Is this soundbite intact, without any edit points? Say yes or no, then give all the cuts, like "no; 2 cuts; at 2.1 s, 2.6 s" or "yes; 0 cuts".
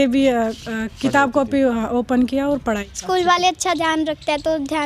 no; 1 cut; at 2.6 s